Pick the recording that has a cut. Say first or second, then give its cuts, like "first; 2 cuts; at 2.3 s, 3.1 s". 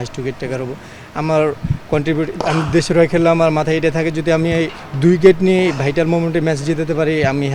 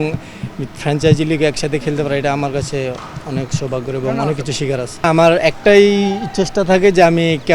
second; 1 cut; at 5.0 s